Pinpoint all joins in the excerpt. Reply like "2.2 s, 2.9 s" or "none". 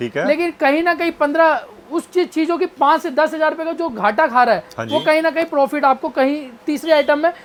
none